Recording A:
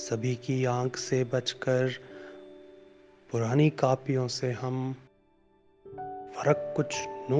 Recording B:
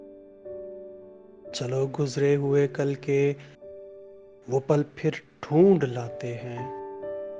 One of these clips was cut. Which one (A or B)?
B